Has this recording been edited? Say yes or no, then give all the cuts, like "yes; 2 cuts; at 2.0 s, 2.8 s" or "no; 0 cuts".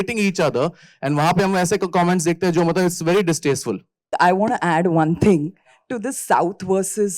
yes; 1 cut; at 4.1 s